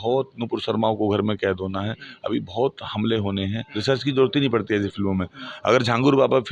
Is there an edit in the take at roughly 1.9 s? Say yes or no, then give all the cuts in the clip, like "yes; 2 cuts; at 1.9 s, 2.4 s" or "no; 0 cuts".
no; 1 cut; at 3.7 s